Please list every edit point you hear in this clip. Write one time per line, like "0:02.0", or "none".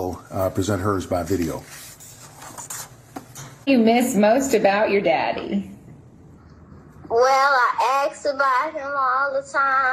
0:03.7